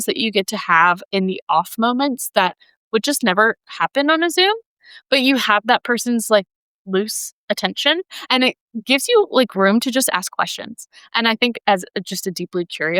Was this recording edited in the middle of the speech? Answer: no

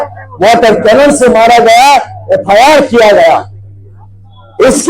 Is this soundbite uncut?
yes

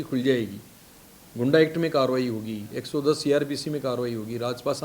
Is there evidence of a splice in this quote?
no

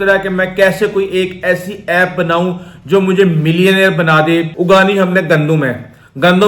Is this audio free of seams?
no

